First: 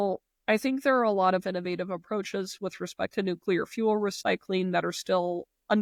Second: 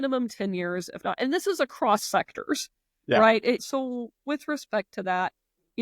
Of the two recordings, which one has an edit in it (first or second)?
second